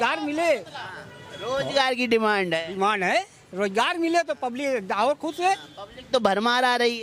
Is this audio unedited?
yes; 0 cuts

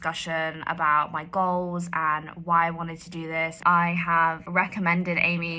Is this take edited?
yes; 2 cuts; at 3.6 s, 4.4 s

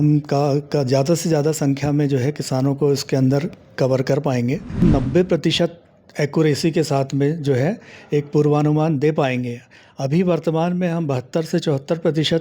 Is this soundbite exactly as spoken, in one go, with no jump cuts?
no; 1 cut; at 4.8 s

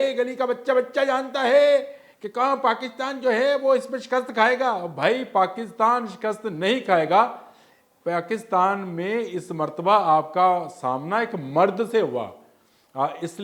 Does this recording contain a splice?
no; 0 cuts

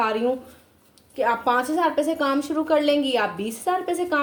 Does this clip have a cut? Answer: no; 0 cuts

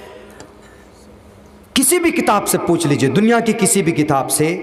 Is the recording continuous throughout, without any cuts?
yes; 0 cuts

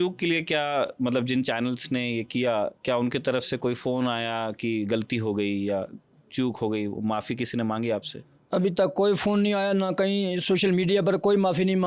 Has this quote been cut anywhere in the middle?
no; 0 cuts

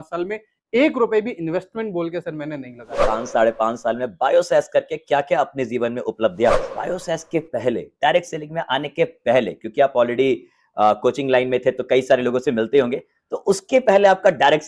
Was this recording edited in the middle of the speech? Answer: yes; 2 cuts; at 3.1 s, 6.7 s

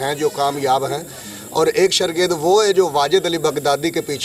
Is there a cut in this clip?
no; 0 cuts

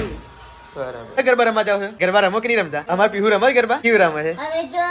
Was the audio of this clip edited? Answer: yes; 4 cuts; at 1.2 s, 1.9 s, 2.8 s, 3.8 s

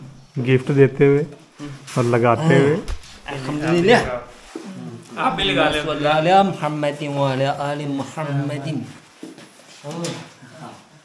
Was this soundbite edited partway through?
no; 0 cuts

